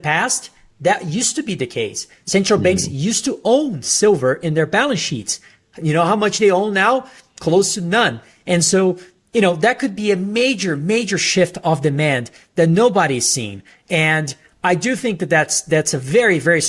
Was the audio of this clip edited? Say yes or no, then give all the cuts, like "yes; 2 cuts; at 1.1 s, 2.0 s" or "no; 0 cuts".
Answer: no; 0 cuts